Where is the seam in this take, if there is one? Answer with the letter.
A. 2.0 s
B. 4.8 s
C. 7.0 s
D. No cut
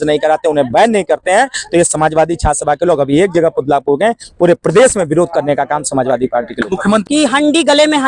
C